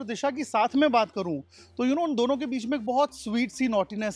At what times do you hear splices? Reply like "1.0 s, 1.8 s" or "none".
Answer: none